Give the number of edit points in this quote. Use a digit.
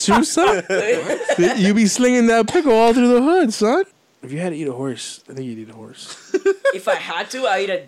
1